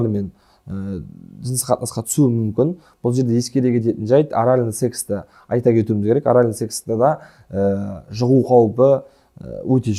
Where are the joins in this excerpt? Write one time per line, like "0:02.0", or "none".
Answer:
none